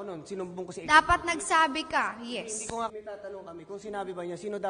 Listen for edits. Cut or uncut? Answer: cut